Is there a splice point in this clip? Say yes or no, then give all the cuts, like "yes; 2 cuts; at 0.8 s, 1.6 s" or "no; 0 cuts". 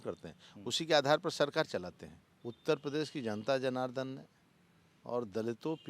yes; 1 cut; at 2.2 s